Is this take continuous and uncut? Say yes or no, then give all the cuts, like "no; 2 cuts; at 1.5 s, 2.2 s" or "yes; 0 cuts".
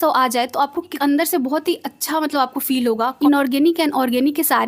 no; 2 cuts; at 1.0 s, 3.1 s